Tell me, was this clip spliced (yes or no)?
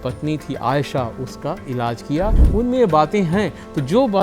yes